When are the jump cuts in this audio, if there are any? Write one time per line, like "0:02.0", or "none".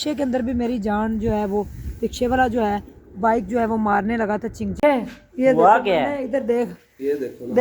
0:04.7